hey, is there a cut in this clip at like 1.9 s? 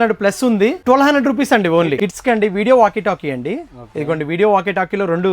yes; 2 cuts; at 0.8 s, 1.9 s

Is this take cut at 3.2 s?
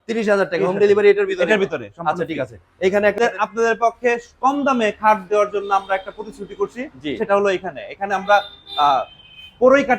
yes; 1 cut; at 3.2 s

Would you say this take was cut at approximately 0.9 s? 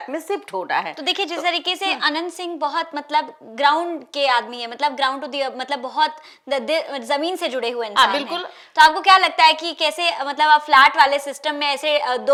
no; 0 cuts

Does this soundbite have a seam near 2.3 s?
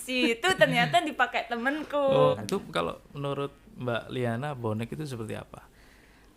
yes; 1 cut; at 2.3 s

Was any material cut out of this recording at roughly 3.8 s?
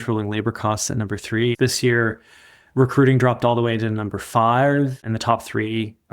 no; 2 cuts; at 1.6 s, 5.0 s

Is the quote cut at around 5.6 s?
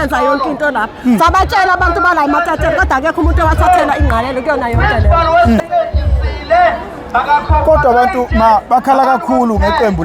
yes; 1 cut; at 5.6 s

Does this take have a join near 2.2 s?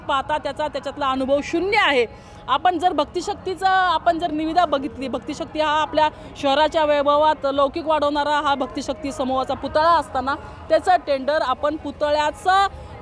no; 0 cuts

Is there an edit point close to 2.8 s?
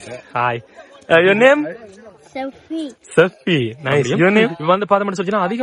no; 1 cut; at 4.6 s

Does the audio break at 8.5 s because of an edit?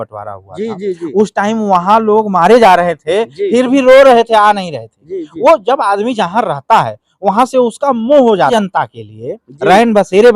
yes; 1 cut; at 8.5 s

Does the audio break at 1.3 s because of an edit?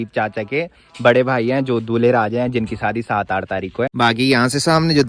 no; 1 cut; at 3.9 s

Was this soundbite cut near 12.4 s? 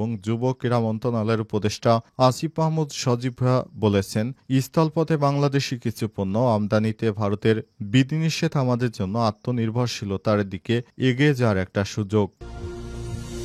yes; 1 cut; at 12.4 s

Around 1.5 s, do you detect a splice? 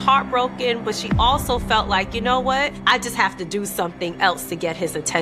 no; 1 cut; at 2.8 s

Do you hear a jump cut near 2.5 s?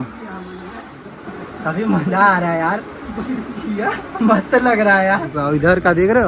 no; 2 cuts; at 1.1 s, 5.3 s

